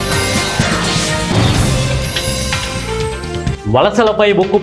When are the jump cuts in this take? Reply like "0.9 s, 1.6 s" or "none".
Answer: 3.6 s